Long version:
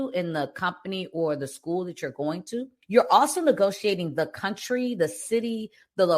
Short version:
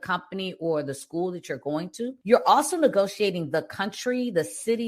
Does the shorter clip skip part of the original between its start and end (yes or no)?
yes